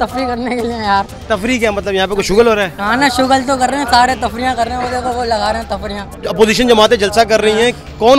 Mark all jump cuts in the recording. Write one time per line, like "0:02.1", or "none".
0:06.1

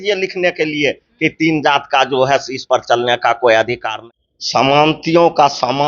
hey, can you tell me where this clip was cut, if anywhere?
0:03.9

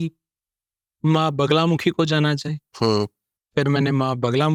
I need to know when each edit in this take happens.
none

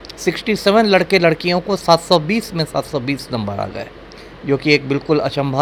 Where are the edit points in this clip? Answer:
none

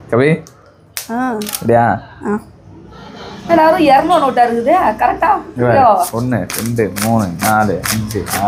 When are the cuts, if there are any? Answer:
none

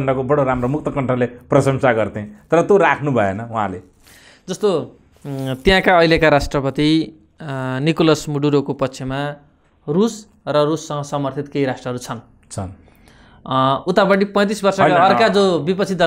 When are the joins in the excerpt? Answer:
none

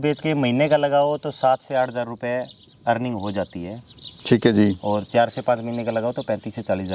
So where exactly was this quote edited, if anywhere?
none

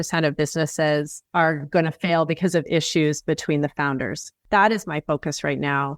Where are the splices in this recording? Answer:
0:01.2
0:04.3

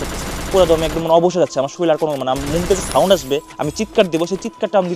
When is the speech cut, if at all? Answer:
none

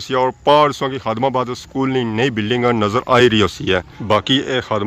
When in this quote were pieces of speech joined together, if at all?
0:03.9

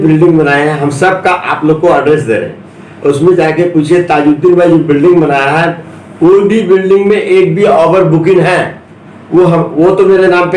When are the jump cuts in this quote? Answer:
none

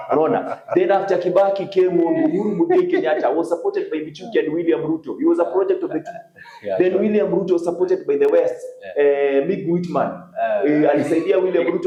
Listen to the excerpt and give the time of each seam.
none

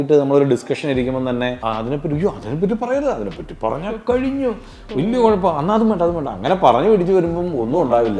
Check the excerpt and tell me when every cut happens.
0:01.6

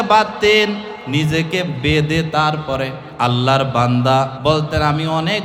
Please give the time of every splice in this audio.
0:00.9
0:03.0
0:04.3

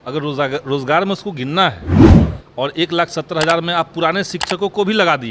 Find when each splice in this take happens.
0:01.8
0:02.3

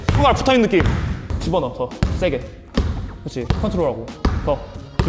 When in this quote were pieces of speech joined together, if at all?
0:01.3

